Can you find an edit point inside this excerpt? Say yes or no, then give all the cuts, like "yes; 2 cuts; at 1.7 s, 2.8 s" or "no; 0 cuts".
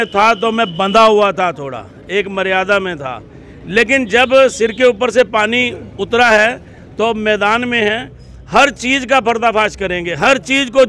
no; 0 cuts